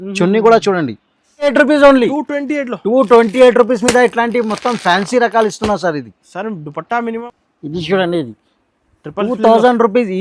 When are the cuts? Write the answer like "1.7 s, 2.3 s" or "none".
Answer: 1.5 s, 7.1 s